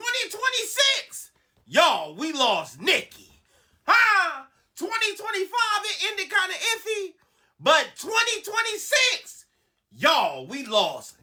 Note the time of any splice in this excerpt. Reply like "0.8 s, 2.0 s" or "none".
none